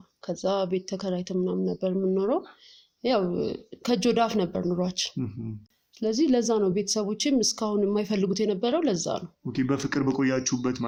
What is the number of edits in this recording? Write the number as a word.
zero